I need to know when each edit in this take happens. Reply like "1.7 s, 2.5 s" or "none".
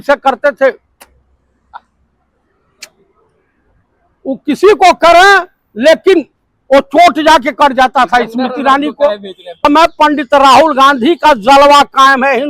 9.6 s